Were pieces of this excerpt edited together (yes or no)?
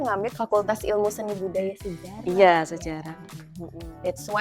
no